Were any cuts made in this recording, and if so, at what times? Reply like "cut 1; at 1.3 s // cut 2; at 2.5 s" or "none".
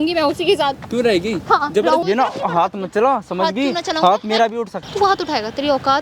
cut 1; at 2.0 s // cut 2; at 4.8 s